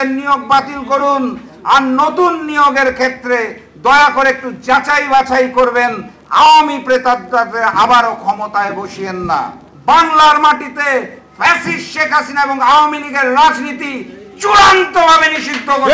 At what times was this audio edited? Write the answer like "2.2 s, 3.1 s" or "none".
9.6 s